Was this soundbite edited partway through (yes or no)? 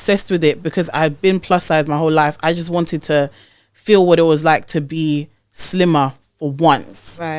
no